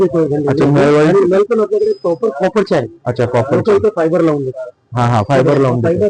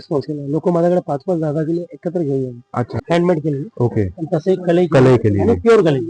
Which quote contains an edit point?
second; 1 cut; at 3.0 s

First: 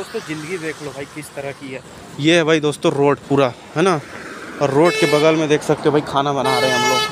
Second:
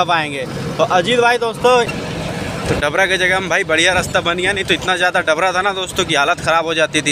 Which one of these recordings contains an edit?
second; 1 cut; at 1.9 s

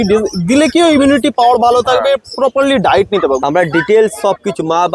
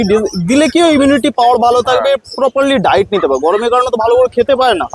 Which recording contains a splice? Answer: first; 1 cut; at 3.4 s

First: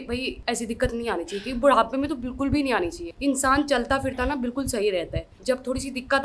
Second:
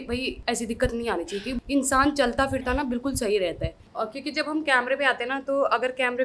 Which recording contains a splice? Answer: second; 2 cuts; at 1.6 s, 3.8 s

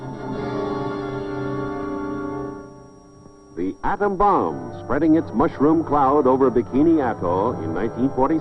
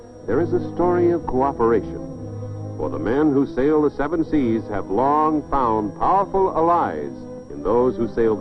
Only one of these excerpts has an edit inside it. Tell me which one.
second; 1 cut; at 6.9 s

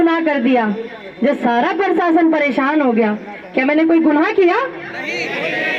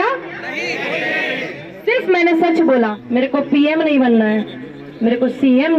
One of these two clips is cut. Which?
second; 1 cut; at 3.0 s

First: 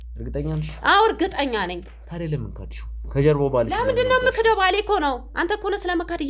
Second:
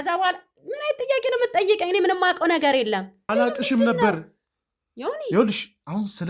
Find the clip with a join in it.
second; 1 cut; at 3.3 s

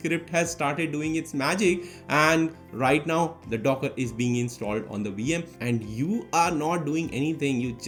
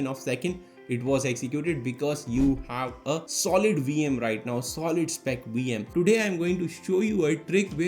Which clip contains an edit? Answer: second; 1 cut; at 5.9 s

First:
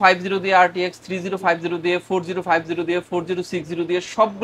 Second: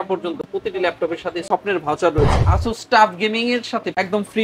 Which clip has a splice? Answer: second; 1 cut; at 2.4 s

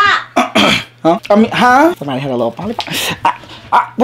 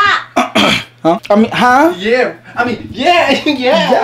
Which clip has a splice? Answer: first; 1 cut; at 2.0 s

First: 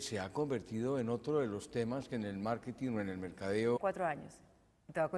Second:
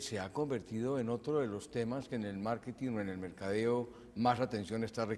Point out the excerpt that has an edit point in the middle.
second; 1 cut; at 3.8 s

